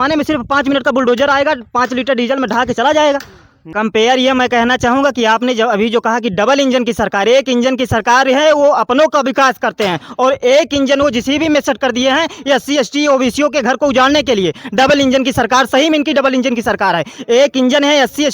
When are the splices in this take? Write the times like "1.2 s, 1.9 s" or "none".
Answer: 3.7 s